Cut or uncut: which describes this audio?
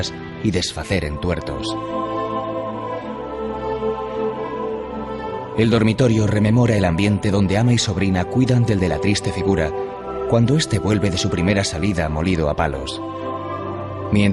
cut